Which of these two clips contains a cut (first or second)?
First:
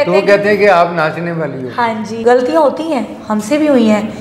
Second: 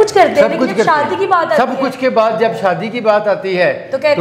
first